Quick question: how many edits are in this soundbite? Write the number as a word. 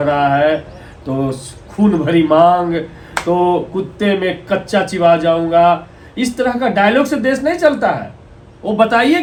zero